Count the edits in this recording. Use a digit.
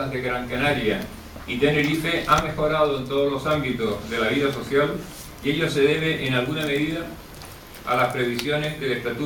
1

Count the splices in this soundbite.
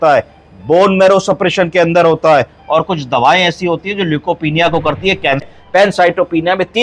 1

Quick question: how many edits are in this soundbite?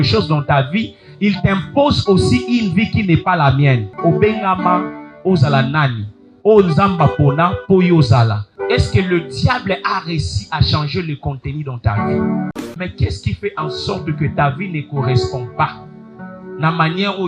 3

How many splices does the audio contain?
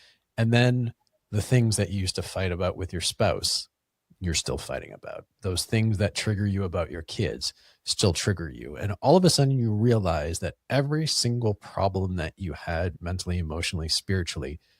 1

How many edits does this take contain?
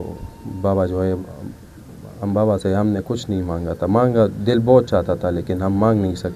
0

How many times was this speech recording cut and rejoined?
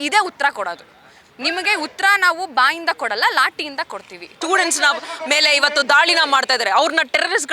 1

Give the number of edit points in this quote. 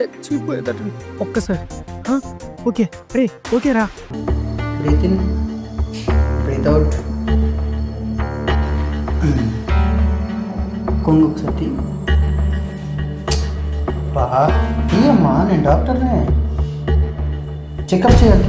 1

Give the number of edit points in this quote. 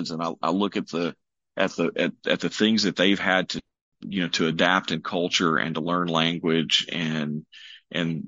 0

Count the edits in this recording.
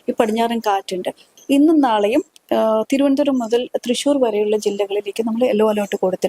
1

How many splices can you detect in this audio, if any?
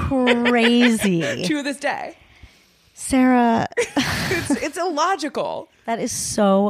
1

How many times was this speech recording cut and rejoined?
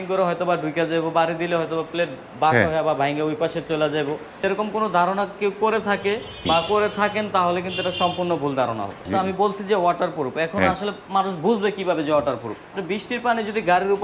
4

